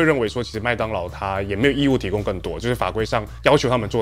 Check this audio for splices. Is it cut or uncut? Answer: uncut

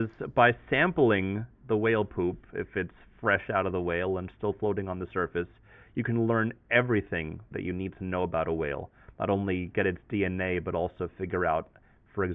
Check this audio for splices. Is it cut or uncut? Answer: uncut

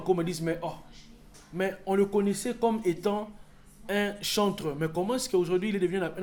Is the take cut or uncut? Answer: uncut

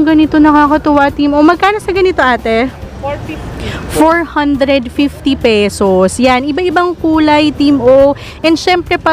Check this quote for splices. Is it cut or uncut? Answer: uncut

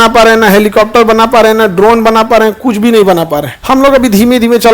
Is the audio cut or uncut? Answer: cut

